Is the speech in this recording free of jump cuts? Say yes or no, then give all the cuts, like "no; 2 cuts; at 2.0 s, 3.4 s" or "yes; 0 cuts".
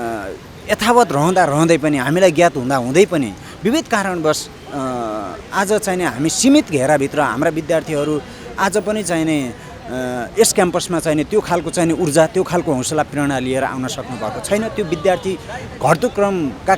yes; 0 cuts